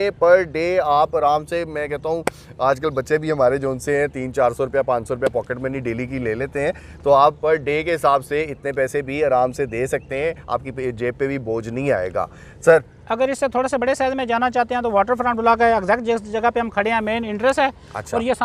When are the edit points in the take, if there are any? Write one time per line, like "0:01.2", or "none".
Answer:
none